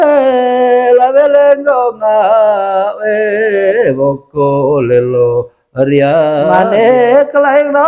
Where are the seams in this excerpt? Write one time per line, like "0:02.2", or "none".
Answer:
0:06.5